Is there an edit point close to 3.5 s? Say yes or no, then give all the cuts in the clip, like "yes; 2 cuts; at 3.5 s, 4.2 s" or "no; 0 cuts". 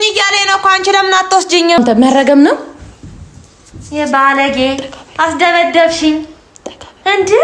no; 1 cut; at 1.8 s